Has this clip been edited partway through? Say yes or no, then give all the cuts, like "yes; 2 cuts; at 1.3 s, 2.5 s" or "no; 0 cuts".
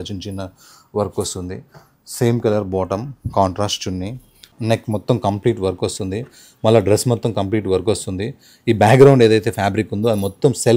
yes; 1 cut; at 4.5 s